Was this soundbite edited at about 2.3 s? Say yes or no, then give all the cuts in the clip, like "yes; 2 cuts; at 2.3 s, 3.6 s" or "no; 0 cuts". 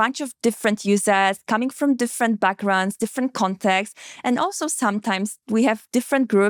no; 0 cuts